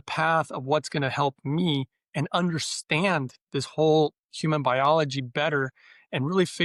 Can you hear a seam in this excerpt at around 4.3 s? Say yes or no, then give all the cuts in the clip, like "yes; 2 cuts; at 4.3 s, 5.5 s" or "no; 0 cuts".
no; 0 cuts